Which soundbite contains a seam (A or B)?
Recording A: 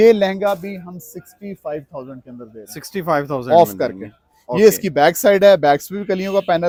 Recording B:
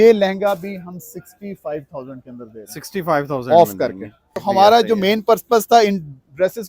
B